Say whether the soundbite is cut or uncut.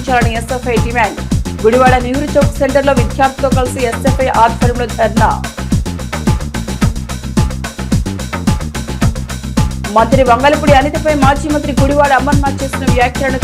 uncut